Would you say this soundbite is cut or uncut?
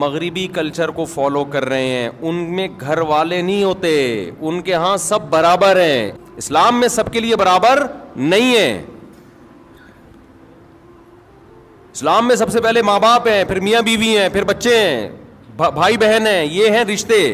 cut